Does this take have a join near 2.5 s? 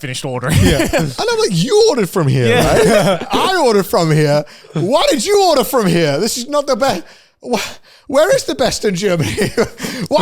no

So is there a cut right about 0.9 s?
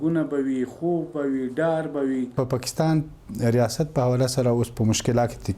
no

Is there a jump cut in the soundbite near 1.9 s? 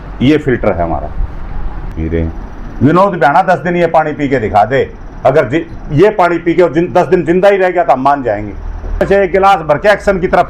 yes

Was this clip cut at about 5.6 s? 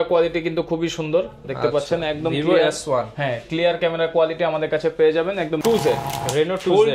yes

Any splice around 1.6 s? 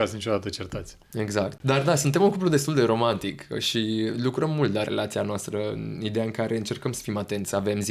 yes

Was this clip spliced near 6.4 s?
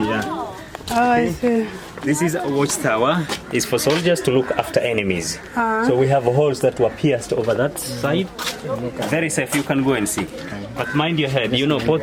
no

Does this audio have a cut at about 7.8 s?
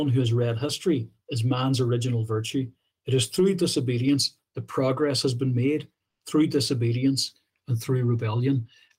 no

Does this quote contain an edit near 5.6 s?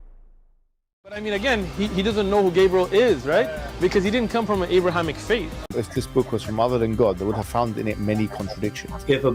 yes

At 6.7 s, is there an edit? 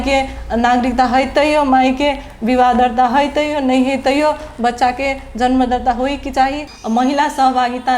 yes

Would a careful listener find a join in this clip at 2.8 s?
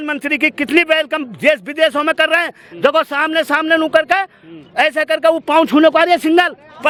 no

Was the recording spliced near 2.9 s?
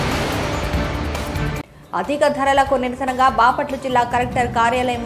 no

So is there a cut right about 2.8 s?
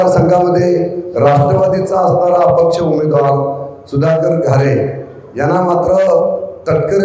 no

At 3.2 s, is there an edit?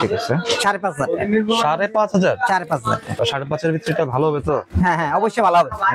yes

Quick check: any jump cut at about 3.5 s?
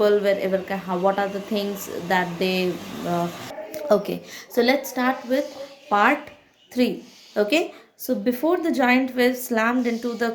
yes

